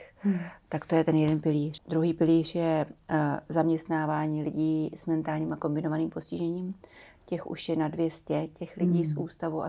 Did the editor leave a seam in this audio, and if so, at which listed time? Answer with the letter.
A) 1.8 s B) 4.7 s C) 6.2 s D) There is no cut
A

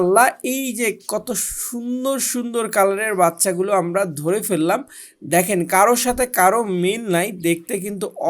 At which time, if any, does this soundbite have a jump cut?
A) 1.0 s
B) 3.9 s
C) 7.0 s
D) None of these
D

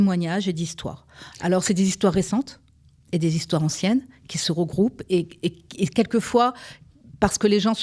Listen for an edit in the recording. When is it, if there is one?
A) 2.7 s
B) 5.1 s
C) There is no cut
C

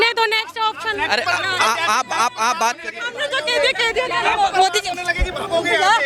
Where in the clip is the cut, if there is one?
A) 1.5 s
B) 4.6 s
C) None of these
C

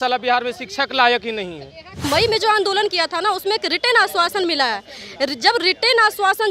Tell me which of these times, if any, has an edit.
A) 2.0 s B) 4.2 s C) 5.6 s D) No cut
A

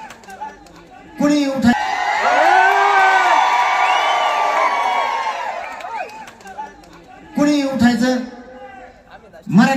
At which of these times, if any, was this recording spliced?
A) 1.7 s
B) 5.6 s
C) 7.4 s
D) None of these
A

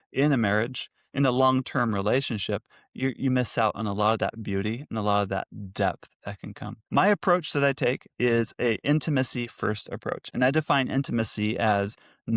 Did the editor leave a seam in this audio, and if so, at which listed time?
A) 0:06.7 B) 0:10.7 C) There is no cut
A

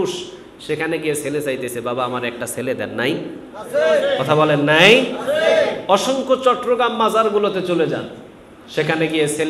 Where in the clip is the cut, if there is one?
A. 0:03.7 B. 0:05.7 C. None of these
C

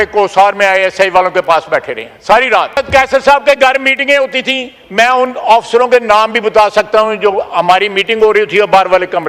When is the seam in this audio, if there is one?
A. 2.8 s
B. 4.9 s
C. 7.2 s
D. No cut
A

